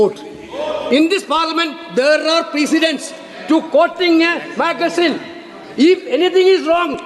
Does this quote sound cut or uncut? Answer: uncut